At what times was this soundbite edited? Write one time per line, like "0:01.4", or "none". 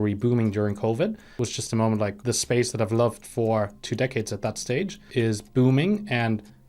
0:01.2
0:02.2
0:05.0